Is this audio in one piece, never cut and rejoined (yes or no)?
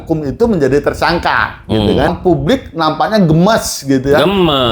no